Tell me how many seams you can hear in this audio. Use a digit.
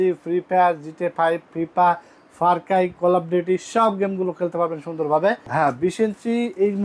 1